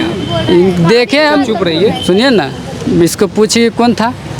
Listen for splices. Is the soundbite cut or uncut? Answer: uncut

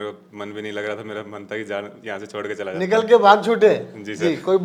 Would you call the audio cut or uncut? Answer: uncut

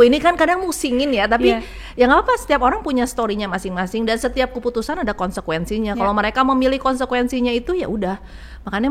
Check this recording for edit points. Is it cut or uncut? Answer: uncut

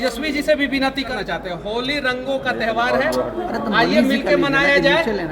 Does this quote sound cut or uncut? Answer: cut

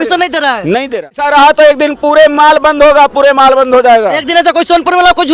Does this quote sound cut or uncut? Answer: cut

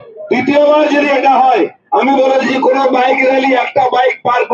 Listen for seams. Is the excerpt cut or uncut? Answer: uncut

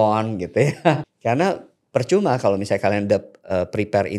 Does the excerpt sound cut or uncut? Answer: cut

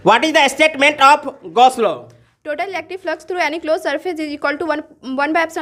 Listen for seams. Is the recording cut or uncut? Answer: uncut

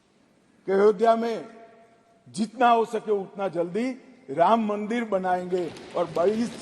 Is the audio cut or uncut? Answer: uncut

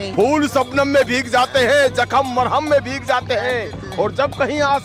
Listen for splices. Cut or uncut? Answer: uncut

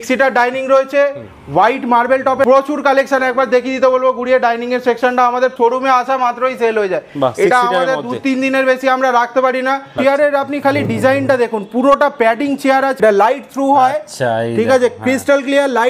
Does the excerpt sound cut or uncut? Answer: cut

